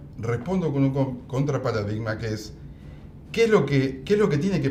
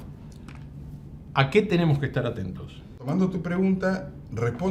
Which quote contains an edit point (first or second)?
second